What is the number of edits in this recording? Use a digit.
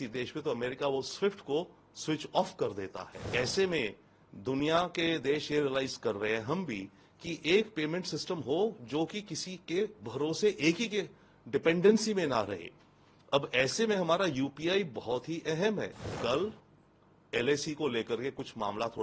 2